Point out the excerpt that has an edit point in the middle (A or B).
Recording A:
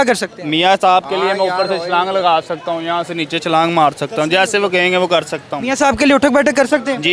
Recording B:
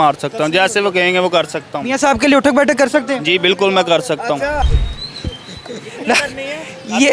B